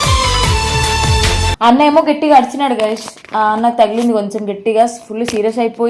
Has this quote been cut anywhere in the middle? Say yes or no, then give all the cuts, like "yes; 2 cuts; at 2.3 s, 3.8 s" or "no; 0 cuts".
yes; 1 cut; at 1.4 s